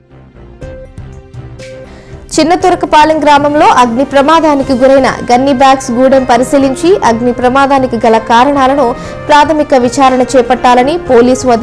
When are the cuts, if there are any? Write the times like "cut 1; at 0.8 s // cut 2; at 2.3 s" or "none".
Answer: none